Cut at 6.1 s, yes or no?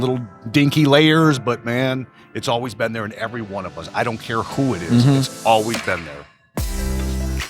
yes